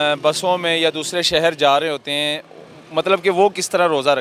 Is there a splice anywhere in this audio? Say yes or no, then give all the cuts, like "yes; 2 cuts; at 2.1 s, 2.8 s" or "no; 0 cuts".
no; 0 cuts